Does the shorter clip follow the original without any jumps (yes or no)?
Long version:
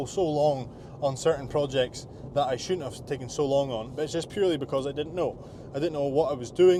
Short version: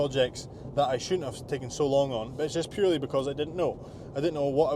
yes